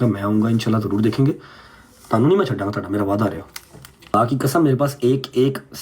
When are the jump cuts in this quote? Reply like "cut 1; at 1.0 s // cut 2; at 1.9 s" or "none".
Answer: cut 1; at 4.1 s